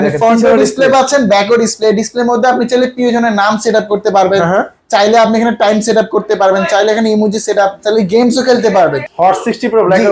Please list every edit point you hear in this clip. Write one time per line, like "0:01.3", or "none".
0:09.1